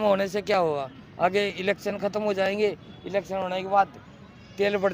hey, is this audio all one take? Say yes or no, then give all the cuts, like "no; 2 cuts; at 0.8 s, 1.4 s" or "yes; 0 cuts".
yes; 0 cuts